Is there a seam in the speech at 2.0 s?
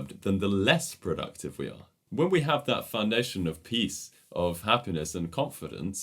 yes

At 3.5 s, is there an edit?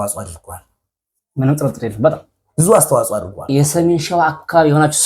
yes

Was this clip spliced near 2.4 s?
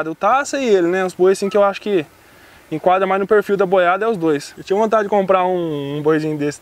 no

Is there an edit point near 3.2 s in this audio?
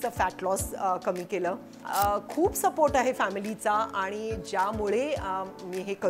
no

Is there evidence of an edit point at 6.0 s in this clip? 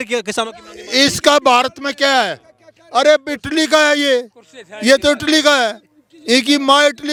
no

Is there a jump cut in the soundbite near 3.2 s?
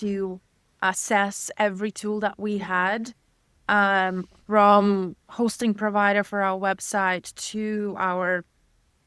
no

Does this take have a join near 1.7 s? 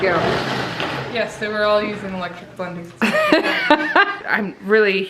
no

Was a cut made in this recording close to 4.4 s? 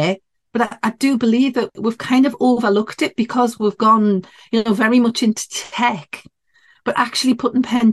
no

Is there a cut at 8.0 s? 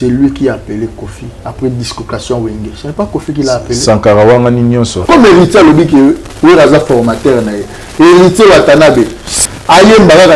no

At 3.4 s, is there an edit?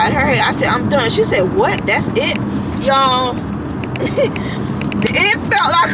no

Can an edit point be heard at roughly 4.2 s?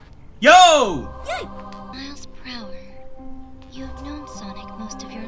no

